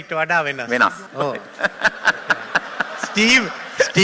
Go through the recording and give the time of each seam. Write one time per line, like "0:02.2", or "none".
0:01.0